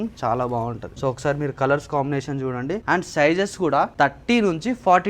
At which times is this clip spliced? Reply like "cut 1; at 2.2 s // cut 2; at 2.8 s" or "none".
cut 1; at 0.9 s // cut 2; at 2.8 s // cut 3; at 3.9 s